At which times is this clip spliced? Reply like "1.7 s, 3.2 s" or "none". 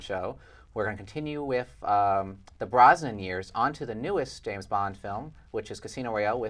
none